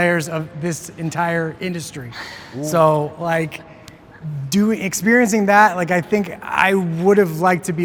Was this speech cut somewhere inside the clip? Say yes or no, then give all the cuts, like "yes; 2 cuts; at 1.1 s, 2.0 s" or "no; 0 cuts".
no; 0 cuts